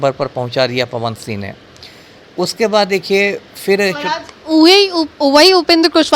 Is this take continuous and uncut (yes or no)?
yes